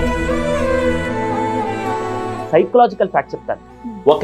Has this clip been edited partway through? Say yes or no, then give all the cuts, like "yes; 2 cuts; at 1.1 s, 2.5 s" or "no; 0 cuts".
yes; 1 cut; at 2.4 s